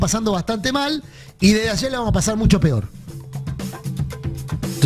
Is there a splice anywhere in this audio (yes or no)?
no